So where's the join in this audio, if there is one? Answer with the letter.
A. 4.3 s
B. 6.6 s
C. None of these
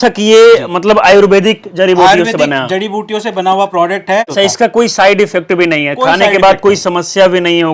A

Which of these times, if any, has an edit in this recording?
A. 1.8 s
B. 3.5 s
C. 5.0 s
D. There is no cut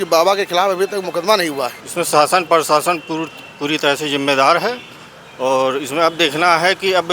A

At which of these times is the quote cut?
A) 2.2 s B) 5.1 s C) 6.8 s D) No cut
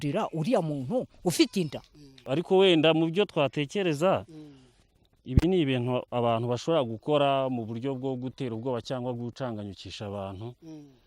A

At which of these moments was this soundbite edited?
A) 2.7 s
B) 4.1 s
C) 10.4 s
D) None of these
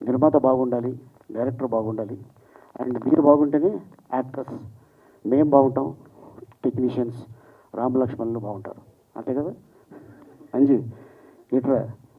C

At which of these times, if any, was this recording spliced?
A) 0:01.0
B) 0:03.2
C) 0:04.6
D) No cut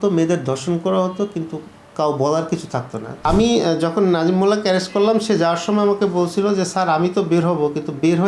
B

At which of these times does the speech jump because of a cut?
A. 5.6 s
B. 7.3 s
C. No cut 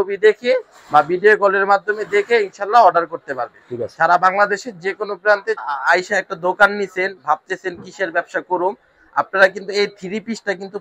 A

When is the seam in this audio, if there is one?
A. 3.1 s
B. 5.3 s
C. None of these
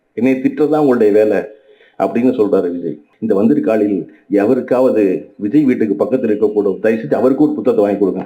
A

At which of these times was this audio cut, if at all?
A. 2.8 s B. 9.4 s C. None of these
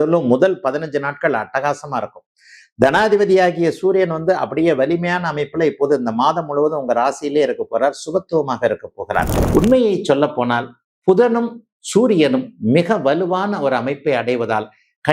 B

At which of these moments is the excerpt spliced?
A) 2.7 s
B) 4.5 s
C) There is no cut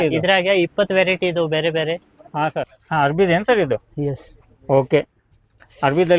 A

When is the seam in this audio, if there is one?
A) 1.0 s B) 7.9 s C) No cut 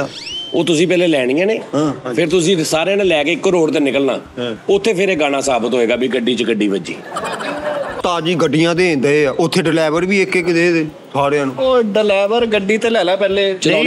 B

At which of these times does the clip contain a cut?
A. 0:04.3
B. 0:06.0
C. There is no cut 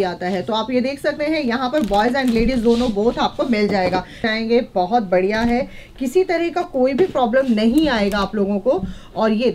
A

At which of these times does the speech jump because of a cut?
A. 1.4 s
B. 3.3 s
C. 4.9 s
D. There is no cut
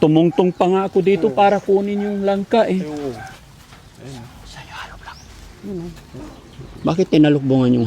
B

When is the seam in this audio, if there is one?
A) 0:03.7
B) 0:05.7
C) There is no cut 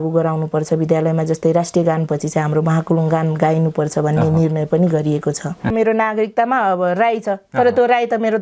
B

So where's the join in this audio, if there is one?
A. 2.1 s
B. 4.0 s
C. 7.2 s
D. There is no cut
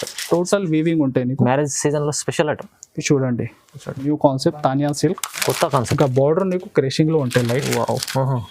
B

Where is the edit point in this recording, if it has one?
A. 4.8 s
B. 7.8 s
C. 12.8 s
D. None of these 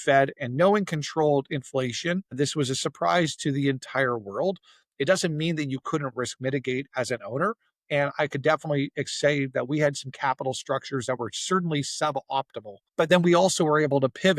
C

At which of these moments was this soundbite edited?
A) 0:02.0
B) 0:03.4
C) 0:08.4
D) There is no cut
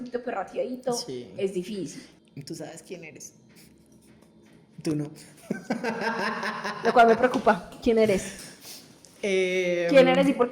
A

